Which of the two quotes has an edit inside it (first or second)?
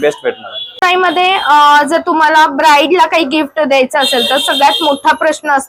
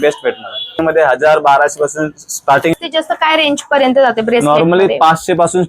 second